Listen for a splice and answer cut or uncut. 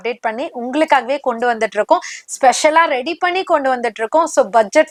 uncut